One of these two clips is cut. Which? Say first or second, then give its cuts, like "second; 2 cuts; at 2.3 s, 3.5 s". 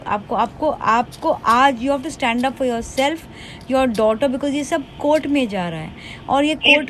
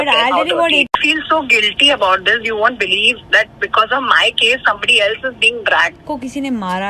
second; 2 cuts; at 0.9 s, 6.0 s